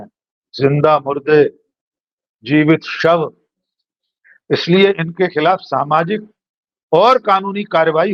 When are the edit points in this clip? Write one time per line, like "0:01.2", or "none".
none